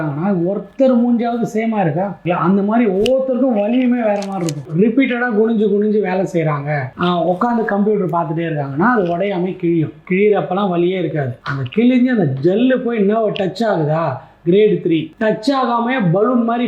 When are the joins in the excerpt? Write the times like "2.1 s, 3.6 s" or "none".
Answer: 2.2 s, 4.6 s